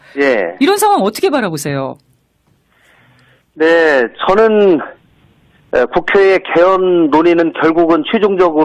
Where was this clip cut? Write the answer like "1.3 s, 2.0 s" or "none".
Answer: none